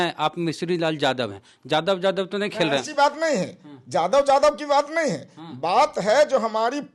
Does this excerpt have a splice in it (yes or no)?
no